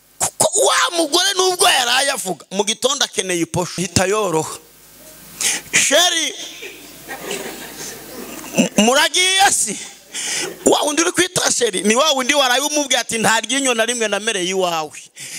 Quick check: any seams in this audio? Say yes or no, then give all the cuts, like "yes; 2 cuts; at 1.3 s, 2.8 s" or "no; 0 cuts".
yes; 1 cut; at 3.8 s